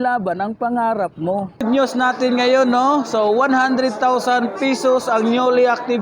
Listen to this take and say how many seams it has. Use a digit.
1